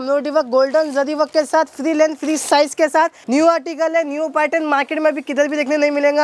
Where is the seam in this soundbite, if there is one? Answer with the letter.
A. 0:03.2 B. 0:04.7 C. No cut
A